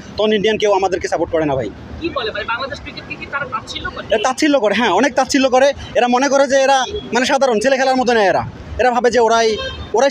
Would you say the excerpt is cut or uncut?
uncut